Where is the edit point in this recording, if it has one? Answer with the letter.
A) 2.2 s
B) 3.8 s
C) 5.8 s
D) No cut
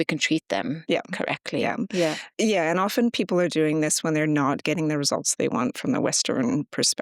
A